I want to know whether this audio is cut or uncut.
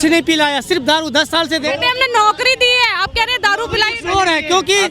uncut